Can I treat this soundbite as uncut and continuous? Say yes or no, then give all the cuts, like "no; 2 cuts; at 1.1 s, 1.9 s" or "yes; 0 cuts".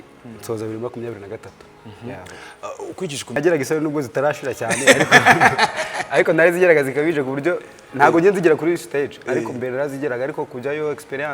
no; 1 cut; at 3.4 s